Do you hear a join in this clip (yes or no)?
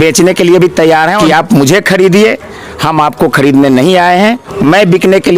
yes